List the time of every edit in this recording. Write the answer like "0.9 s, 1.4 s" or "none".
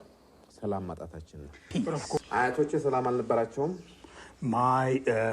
1.9 s

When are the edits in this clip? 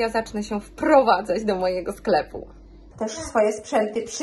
2.9 s

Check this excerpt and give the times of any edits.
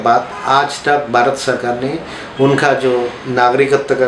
none

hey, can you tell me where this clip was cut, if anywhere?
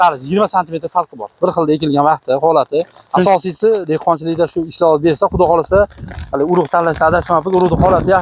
3.0 s

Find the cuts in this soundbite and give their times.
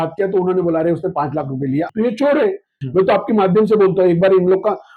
1.9 s, 2.8 s

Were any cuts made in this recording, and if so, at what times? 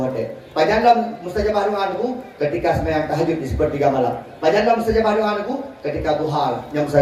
none

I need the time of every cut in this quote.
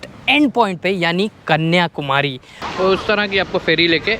2.7 s

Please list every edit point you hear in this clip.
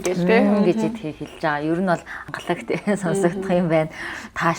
2.1 s

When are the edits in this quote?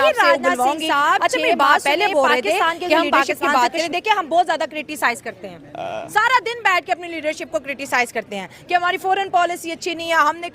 3.4 s

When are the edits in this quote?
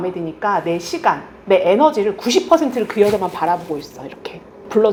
none

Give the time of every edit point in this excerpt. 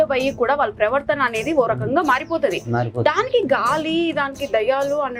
none

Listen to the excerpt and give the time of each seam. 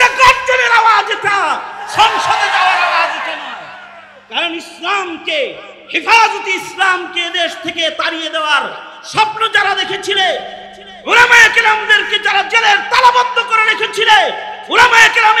none

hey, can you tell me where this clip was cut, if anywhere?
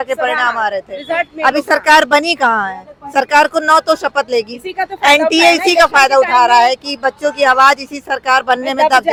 none

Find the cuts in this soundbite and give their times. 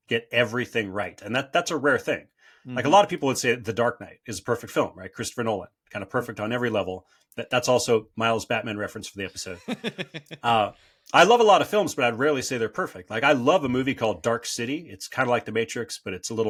none

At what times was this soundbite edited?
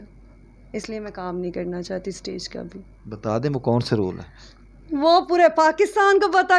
none

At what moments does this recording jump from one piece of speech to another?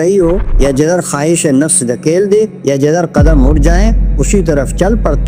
none

